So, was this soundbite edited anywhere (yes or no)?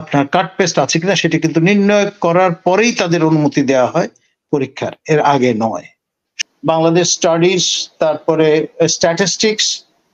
yes